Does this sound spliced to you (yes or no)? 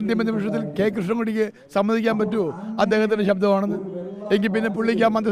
no